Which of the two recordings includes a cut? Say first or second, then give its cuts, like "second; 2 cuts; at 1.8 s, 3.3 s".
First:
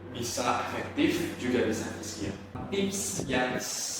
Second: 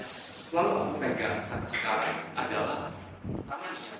first; 1 cut; at 2.6 s